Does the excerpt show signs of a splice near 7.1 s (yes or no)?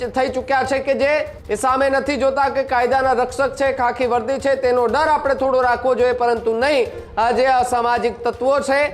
no